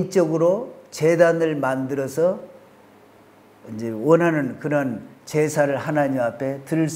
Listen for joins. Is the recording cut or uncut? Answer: uncut